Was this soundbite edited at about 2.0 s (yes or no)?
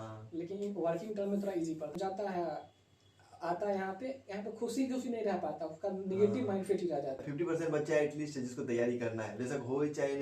yes